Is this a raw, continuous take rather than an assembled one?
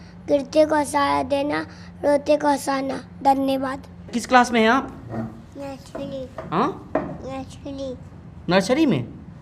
no; 1 cut; at 4.2 s

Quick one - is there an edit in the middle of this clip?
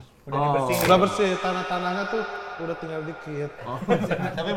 no; 0 cuts

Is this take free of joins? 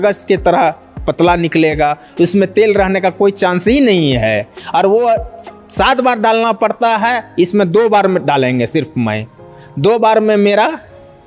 yes; 0 cuts

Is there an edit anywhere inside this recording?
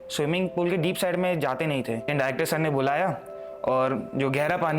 yes; 1 cut; at 2.1 s

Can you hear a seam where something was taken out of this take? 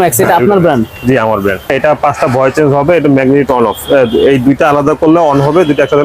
yes; 1 cut; at 1.7 s

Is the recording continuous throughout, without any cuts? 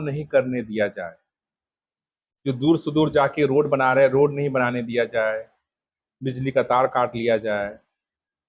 yes; 0 cuts

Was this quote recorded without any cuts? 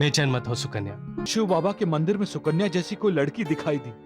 no; 1 cut; at 1.2 s

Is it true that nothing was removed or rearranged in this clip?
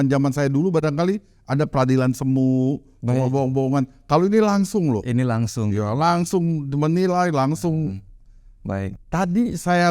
no; 1 cut; at 9.0 s

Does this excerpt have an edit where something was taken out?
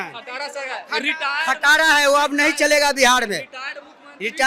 no; 0 cuts

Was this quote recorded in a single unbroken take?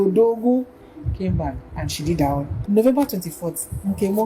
no; 1 cut; at 2.5 s

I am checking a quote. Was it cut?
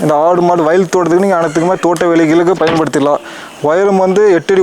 no; 0 cuts

